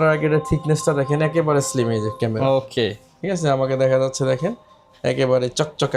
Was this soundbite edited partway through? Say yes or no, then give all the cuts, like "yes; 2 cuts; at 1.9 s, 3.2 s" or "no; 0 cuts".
no; 0 cuts